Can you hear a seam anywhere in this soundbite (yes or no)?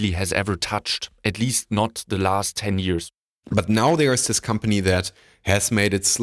yes